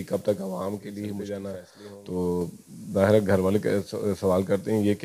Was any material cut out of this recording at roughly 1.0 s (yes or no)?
yes